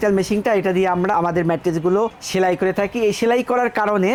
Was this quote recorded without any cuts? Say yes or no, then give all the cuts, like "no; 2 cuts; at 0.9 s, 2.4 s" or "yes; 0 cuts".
yes; 0 cuts